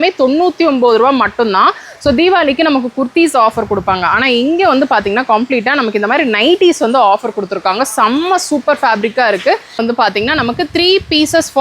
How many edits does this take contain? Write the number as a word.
one